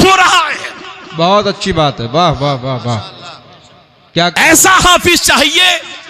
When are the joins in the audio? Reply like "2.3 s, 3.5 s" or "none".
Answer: none